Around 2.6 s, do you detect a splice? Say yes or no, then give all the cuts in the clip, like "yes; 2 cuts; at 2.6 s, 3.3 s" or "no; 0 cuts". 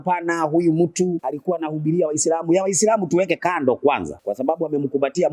no; 2 cuts; at 1.3 s, 4.1 s